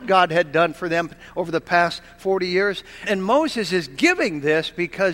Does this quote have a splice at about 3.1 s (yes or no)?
yes